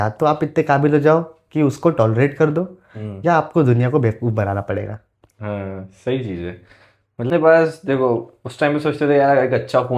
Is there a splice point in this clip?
yes; 1 cut; at 7.3 s

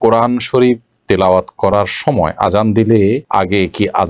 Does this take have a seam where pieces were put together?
no; 0 cuts

